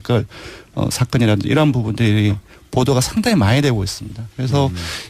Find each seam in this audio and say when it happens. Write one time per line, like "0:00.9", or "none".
0:03.0